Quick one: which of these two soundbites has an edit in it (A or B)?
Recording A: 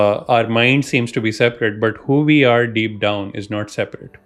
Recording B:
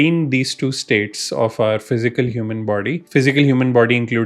B